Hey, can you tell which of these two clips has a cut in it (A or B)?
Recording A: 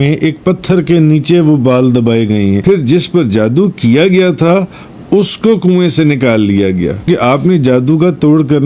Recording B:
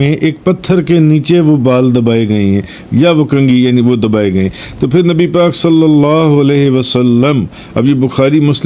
A